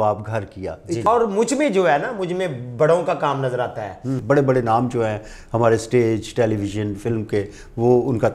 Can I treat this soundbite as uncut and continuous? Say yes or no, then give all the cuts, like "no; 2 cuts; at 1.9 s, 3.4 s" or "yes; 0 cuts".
no; 2 cuts; at 1.0 s, 4.1 s